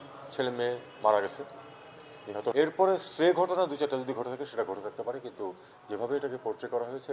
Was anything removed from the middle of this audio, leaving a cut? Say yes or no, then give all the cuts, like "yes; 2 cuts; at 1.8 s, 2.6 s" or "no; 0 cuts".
yes; 1 cut; at 2.5 s